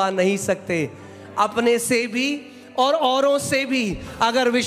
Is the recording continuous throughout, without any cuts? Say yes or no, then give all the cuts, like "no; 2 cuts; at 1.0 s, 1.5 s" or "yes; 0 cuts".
yes; 0 cuts